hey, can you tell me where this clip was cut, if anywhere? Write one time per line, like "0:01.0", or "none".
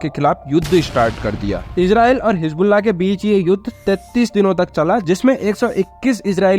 none